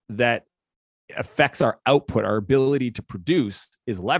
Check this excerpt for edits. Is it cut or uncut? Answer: uncut